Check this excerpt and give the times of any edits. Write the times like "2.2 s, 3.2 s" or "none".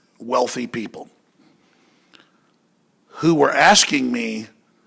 none